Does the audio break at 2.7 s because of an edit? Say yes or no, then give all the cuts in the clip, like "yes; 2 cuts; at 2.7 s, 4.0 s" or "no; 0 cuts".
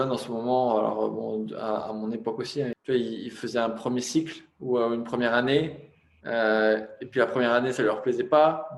yes; 1 cut; at 2.7 s